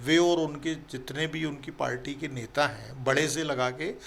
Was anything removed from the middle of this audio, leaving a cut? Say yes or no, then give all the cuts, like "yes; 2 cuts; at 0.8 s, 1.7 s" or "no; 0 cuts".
no; 0 cuts